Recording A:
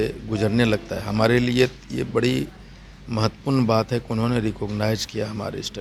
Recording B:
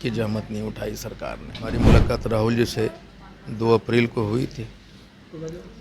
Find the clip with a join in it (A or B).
B